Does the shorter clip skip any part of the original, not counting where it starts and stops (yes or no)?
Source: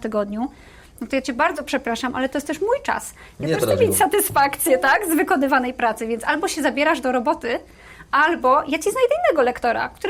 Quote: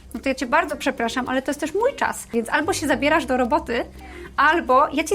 yes